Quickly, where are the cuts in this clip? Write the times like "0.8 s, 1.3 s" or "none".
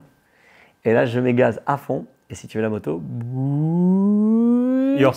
none